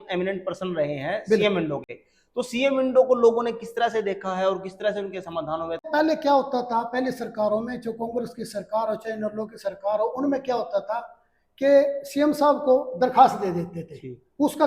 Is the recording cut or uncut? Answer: cut